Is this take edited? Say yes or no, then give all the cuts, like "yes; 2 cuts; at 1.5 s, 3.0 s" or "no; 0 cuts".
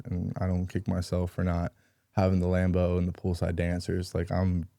no; 0 cuts